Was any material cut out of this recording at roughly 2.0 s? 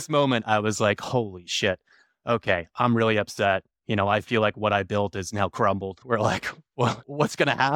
no; 1 cut; at 6.0 s

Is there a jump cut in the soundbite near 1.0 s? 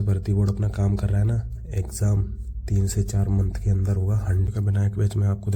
no; 1 cut; at 4.5 s

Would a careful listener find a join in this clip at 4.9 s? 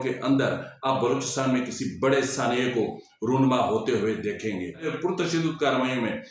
yes; 1 cut; at 4.9 s

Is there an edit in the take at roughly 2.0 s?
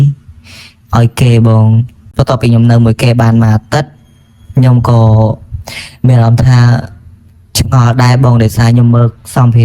yes; 1 cut; at 2.0 s

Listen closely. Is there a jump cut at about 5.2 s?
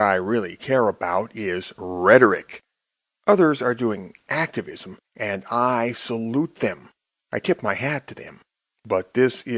no; 1 cut; at 6.5 s

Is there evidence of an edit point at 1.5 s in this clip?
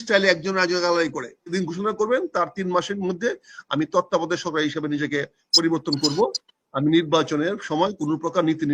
yes; 1 cut; at 1.5 s

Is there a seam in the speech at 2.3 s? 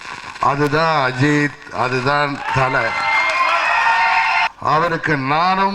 no; 1 cut; at 4.5 s

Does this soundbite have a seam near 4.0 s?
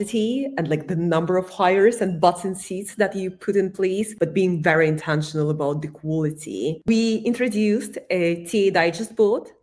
no; 1 cut; at 6.9 s

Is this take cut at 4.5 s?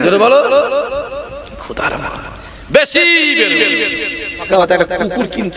yes; 1 cut; at 4.5 s

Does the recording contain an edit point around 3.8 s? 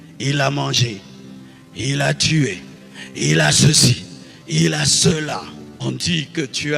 no; 1 cut; at 5.6 s

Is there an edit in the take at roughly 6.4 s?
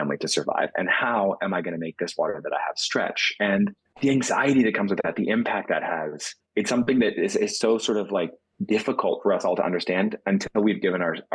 no; 1 cut; at 3.8 s

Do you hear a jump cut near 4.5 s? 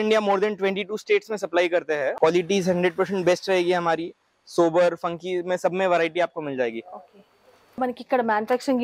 no; 2 cuts; at 2.1 s, 7.7 s

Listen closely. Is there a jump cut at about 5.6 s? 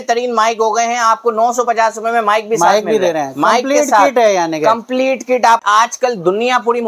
yes; 1 cut; at 5.6 s

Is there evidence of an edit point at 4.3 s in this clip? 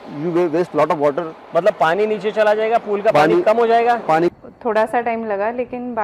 yes; 1 cut; at 4.3 s

